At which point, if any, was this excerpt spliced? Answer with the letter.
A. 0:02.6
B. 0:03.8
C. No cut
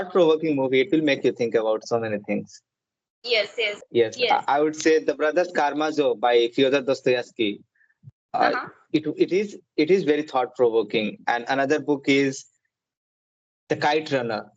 B